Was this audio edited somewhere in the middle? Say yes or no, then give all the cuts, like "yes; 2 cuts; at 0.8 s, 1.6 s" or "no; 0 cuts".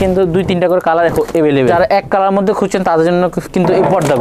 yes; 1 cut; at 1.7 s